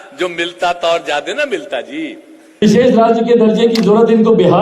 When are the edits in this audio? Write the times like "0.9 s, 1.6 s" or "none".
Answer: 2.6 s